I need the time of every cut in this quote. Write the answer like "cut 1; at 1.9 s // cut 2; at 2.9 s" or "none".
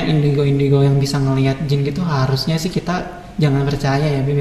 none